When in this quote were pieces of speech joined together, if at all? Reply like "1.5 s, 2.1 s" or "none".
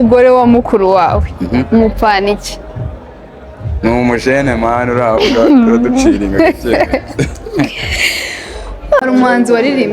9.0 s